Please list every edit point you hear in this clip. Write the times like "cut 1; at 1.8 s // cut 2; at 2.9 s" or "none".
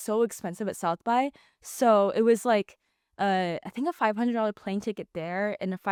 none